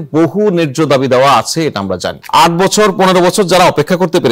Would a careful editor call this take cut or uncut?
cut